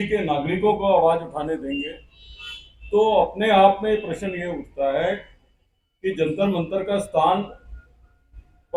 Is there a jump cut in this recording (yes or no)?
no